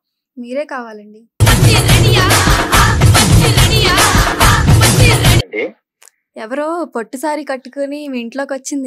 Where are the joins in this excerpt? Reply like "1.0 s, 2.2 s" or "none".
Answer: 5.5 s